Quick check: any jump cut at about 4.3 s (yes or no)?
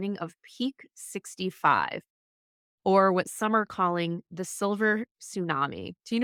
no